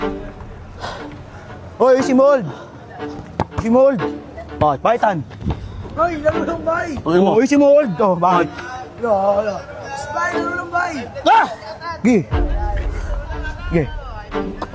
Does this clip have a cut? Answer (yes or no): no